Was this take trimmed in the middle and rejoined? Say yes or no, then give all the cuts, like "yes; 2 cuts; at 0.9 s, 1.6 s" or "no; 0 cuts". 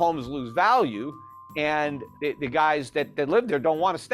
yes; 1 cut; at 2.0 s